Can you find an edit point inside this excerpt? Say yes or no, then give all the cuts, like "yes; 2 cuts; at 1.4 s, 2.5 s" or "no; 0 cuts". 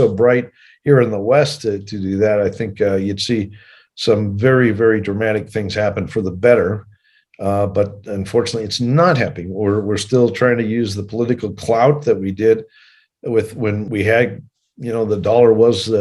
yes; 1 cut; at 13.8 s